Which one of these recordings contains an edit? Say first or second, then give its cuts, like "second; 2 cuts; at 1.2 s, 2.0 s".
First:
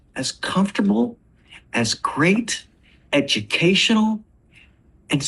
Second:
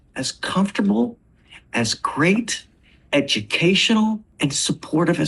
second; 1 cut; at 4.3 s